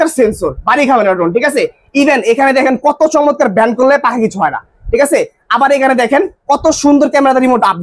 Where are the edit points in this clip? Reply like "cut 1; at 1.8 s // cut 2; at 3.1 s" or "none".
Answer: none